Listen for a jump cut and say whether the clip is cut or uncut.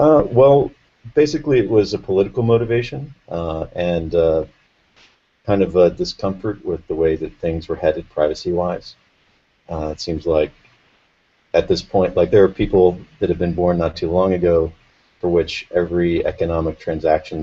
uncut